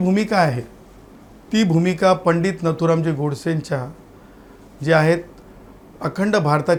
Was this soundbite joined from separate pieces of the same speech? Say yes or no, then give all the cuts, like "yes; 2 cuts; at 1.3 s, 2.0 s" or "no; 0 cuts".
no; 0 cuts